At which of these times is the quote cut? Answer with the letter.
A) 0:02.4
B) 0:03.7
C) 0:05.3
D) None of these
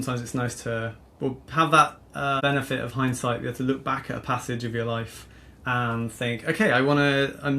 A